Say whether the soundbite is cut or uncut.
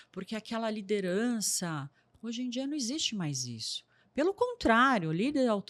uncut